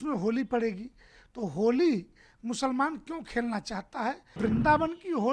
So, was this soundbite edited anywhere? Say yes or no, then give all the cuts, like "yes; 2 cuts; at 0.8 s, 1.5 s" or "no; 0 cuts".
yes; 1 cut; at 4.4 s